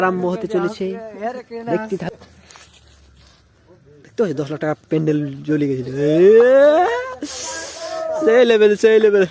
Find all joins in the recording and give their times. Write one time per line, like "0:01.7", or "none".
none